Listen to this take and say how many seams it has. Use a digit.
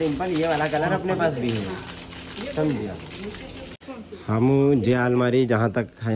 1